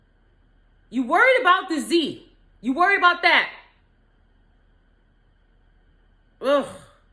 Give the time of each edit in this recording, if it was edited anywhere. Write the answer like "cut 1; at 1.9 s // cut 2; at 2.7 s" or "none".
none